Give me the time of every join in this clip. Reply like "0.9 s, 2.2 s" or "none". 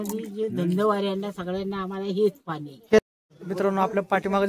3.1 s